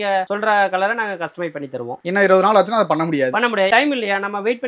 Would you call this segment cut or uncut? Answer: uncut